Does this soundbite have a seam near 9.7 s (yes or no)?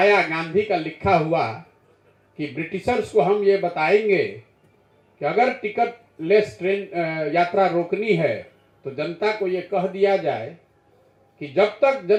no